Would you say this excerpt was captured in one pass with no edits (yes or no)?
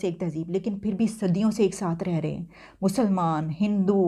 yes